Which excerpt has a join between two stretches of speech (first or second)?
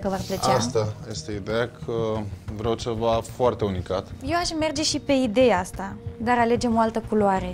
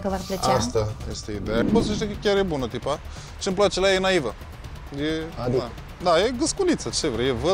second